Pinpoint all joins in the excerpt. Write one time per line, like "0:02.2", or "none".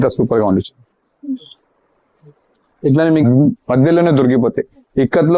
0:03.2